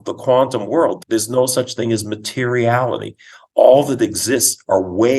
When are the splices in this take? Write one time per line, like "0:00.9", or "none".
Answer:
0:01.0